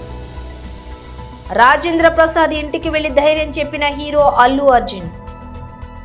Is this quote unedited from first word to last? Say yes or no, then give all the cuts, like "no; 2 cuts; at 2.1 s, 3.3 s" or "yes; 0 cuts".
no; 1 cut; at 1.0 s